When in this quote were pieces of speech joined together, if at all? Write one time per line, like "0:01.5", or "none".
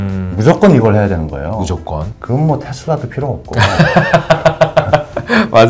0:02.1

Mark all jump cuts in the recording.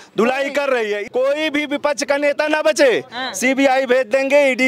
0:01.0

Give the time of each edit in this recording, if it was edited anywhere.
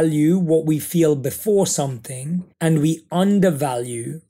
0:02.5

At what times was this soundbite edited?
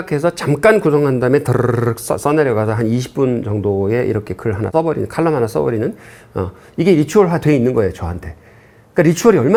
none

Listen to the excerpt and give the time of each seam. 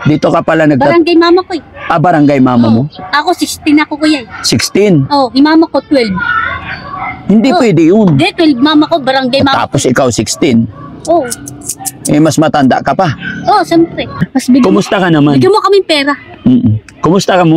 0:14.2

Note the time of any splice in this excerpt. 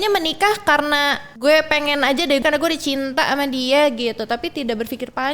0:01.3
0:02.4

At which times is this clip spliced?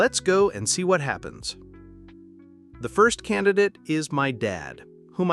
0:01.3
0:02.8

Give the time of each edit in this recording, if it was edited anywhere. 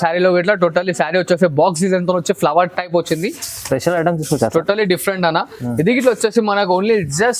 none

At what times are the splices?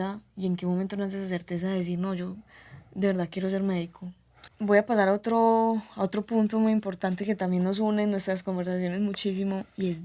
0:04.5

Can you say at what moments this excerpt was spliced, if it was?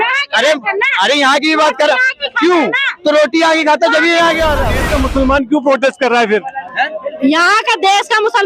0:04.8

